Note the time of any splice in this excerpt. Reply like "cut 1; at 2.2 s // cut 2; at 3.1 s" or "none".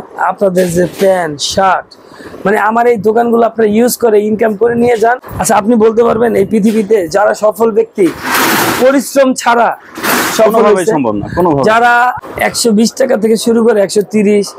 cut 1; at 5.3 s // cut 2; at 12.2 s